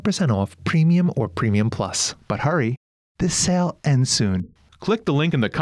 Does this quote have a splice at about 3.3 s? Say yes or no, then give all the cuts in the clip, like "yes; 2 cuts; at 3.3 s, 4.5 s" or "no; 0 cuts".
no; 1 cut; at 2.1 s